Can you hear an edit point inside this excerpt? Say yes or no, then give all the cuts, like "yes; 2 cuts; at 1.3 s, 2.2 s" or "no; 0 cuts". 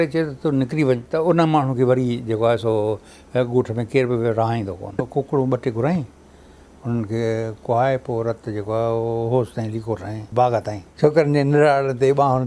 yes; 3 cuts; at 1.1 s, 5.1 s, 10.8 s